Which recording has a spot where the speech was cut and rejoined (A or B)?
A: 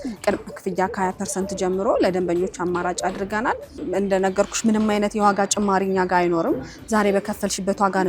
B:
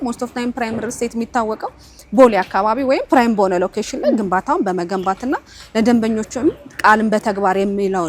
A